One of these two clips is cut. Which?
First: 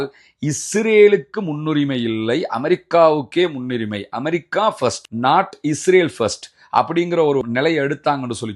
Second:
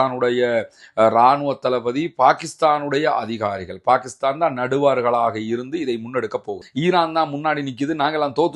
second; 1 cut; at 6.6 s

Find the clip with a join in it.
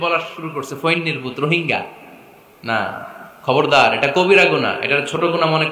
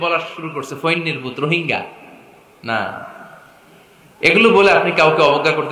first; 1 cut; at 3.2 s

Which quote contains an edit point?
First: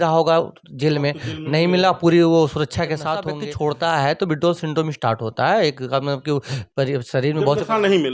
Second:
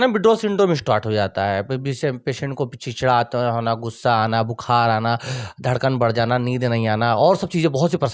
first; 1 cut; at 3.3 s

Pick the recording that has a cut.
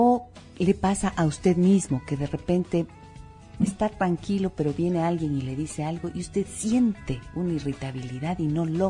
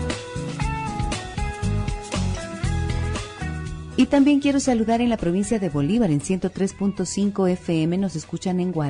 second; 1 cut; at 2.7 s

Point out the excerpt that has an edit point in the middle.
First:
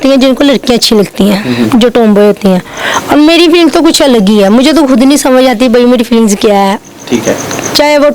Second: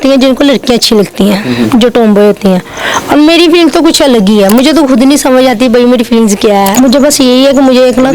second; 1 cut; at 6.7 s

